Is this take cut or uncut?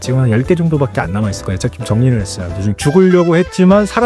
cut